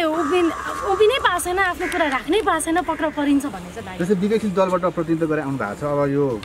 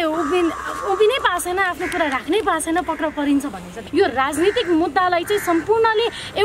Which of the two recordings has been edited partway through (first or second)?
second